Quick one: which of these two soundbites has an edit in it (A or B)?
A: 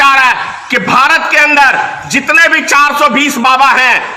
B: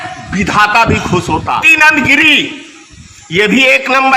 B